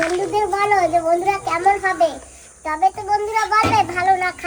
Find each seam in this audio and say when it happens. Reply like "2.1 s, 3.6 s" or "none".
none